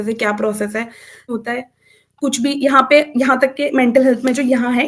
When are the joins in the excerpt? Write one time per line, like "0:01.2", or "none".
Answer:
0:01.3